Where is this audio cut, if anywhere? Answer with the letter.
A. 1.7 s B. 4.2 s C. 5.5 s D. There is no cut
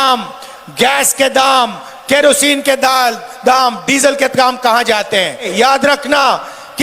C